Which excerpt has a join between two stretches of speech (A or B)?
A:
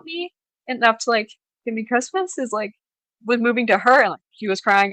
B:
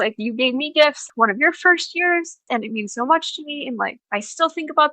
B